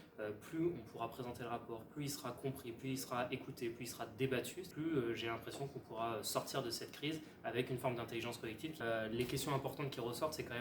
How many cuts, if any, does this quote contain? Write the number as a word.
zero